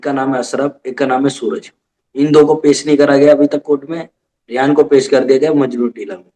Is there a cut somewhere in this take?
no; 0 cuts

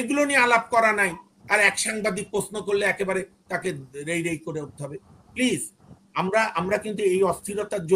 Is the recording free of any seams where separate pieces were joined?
yes; 0 cuts

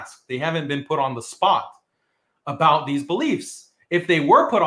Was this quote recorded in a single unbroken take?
yes; 0 cuts

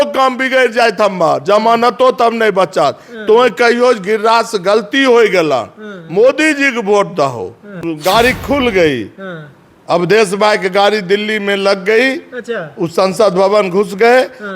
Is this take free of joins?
no; 1 cut; at 7.7 s

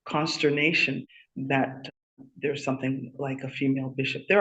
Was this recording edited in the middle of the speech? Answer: yes; 1 cut; at 1.0 s

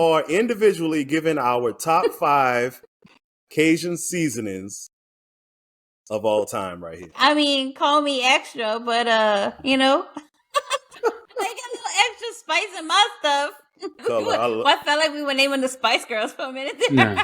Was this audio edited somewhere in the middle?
yes; 3 cuts; at 7.1 s, 10.9 s, 14.0 s

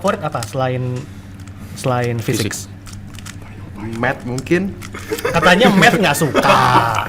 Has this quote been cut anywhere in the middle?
no; 0 cuts

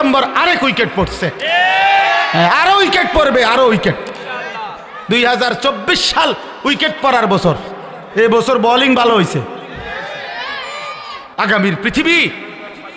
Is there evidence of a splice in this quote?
yes; 1 cut; at 11.3 s

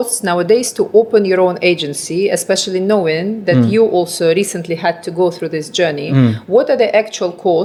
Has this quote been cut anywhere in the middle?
no; 0 cuts

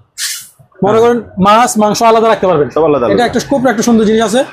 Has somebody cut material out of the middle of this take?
no; 0 cuts

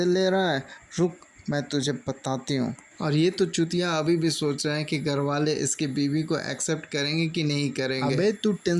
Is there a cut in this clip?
no; 0 cuts

